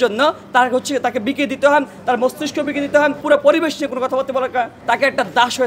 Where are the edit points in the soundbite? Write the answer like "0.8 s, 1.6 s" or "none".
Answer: 3.2 s, 4.8 s